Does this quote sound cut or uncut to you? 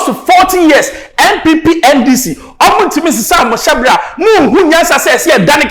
uncut